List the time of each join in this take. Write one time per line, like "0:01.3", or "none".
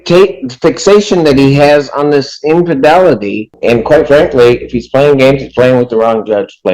0:03.5